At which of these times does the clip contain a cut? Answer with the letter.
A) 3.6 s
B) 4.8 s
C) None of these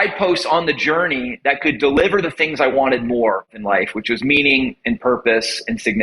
A